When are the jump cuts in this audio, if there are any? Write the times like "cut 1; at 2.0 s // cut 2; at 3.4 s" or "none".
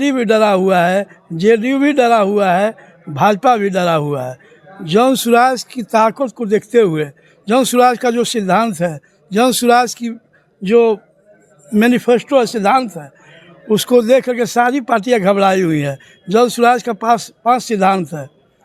none